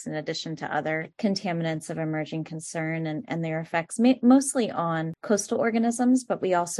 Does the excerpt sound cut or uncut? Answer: cut